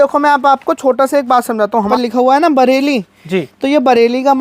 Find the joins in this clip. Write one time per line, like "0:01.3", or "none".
0:01.9